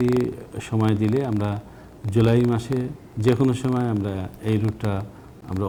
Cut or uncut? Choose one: uncut